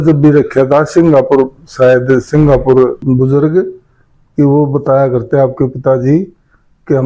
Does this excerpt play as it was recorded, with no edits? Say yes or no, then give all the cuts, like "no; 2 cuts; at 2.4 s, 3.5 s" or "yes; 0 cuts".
no; 1 cut; at 3.0 s